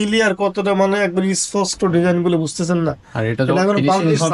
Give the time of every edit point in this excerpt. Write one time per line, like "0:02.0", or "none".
none

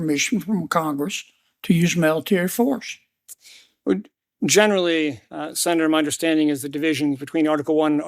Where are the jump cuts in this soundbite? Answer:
0:04.2

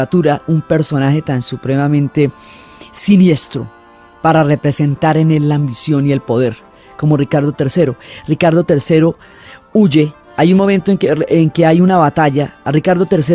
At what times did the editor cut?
none

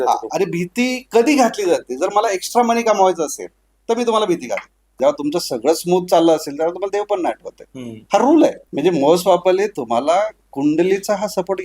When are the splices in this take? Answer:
0:04.9
0:08.6

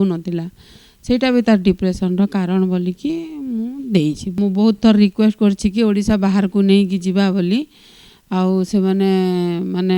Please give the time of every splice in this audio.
0:04.4

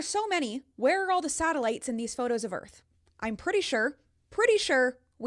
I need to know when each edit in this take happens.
0:01.3

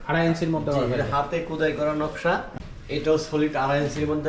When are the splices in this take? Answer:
0:02.6

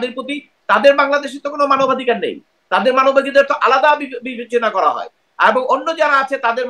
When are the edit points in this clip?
none

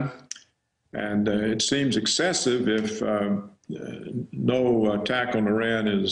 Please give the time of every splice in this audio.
0:01.6

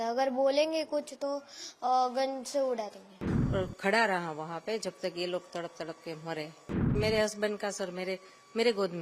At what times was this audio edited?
0:03.3
0:07.0

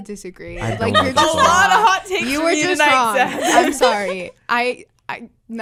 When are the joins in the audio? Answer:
none

